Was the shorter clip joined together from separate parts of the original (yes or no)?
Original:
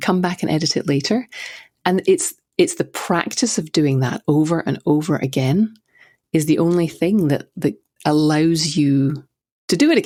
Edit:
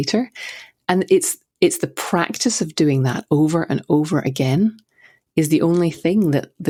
no